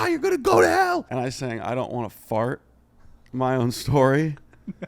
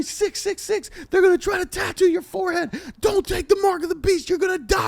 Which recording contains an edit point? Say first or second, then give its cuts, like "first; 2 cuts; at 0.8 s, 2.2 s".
first; 1 cut; at 1.1 s